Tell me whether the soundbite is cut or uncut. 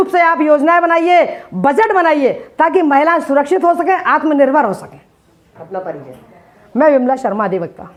uncut